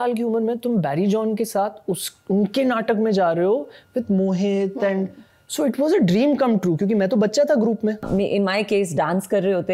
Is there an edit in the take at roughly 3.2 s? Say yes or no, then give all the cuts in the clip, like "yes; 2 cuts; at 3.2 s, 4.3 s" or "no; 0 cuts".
no; 1 cut; at 8.0 s